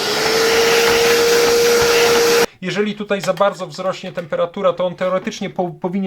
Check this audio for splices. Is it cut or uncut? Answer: cut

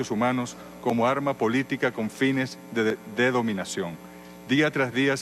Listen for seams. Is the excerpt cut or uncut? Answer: cut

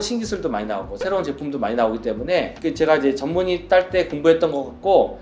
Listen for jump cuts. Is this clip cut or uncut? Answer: uncut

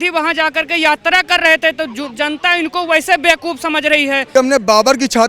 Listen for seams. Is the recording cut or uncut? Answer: cut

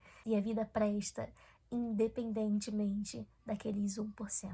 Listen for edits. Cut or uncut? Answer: uncut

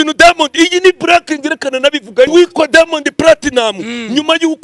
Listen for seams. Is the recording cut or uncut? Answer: cut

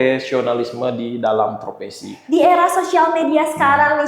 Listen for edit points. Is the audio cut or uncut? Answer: cut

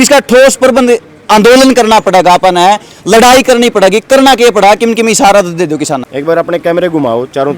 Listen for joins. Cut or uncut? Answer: cut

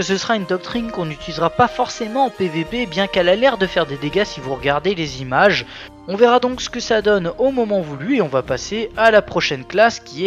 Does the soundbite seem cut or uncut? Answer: uncut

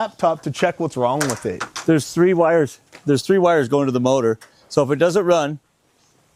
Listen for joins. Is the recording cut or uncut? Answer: uncut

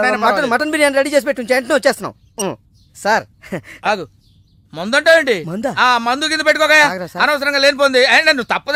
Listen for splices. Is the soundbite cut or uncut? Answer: uncut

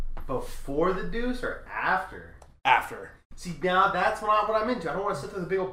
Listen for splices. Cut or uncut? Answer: uncut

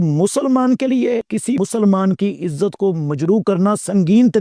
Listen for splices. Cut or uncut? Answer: cut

